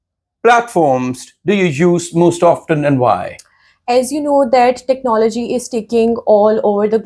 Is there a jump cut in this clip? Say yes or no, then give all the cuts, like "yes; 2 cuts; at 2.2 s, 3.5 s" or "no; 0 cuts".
no; 0 cuts